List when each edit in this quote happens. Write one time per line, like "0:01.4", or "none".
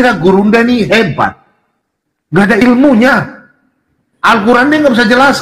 none